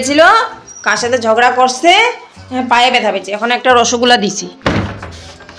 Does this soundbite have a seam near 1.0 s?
no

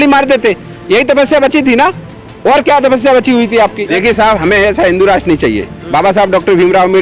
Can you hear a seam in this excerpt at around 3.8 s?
yes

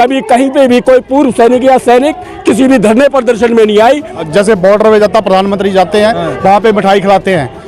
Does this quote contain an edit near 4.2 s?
yes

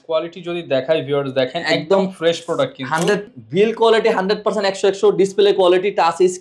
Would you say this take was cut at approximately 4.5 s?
no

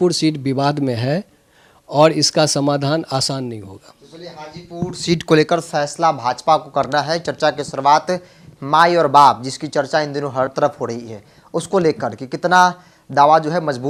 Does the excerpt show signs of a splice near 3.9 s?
no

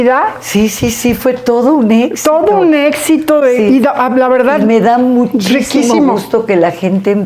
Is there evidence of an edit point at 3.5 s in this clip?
no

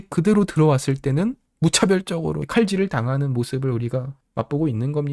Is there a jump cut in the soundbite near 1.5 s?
yes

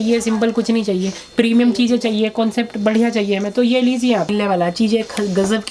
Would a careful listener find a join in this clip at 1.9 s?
no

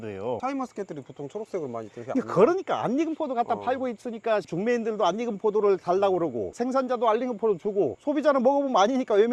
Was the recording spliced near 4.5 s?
no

